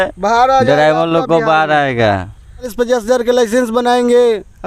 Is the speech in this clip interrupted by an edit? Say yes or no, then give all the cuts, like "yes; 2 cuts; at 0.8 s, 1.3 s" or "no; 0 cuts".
yes; 1 cut; at 2.7 s